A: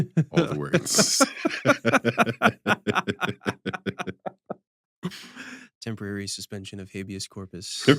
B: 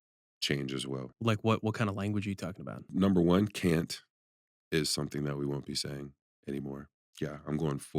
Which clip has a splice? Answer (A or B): B